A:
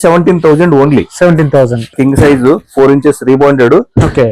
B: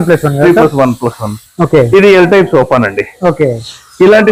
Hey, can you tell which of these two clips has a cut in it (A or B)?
A